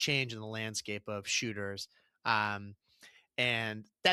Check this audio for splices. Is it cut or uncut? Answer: uncut